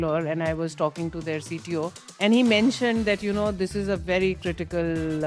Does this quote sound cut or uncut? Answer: cut